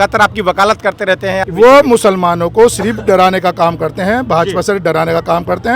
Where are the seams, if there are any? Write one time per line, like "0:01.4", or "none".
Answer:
0:01.5

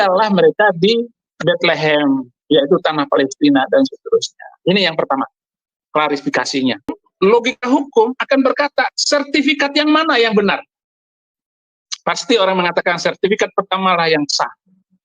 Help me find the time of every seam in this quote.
0:07.0

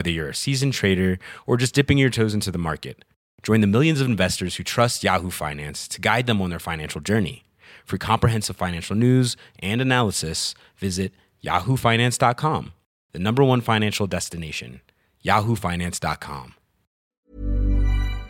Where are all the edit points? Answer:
0:17.1

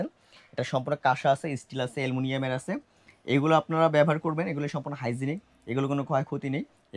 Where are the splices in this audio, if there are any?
none

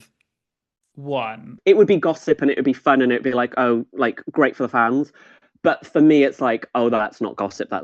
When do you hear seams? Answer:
0:01.5

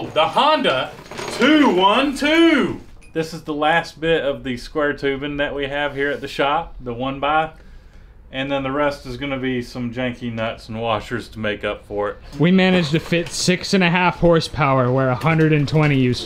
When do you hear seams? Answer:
0:03.1
0:12.3

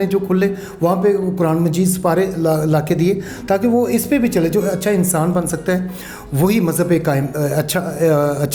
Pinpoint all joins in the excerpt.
none

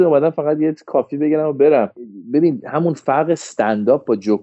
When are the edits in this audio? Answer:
0:02.0

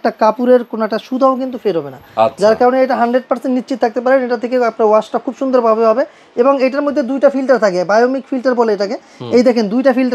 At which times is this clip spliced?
none

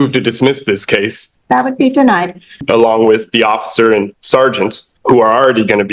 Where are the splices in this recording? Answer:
0:01.2
0:02.6
0:04.9

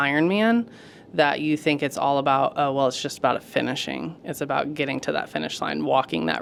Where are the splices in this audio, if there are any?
none

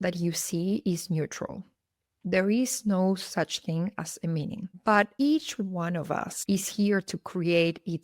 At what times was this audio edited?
none

